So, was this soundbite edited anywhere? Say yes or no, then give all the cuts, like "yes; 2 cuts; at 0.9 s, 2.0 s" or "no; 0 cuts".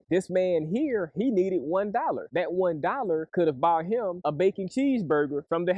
no; 0 cuts